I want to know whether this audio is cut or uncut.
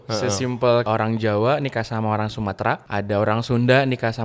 cut